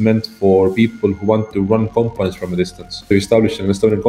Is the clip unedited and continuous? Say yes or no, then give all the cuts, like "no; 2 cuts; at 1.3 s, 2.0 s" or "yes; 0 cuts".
no; 1 cut; at 2.9 s